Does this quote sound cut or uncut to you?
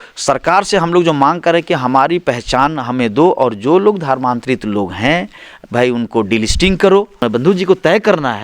cut